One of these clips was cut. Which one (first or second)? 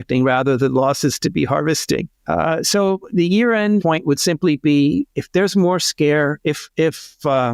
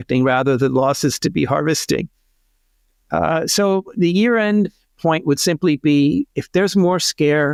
first